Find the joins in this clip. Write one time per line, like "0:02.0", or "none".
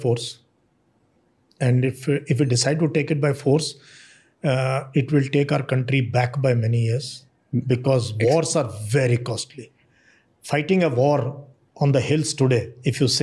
none